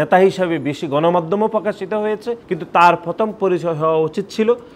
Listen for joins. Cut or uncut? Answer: cut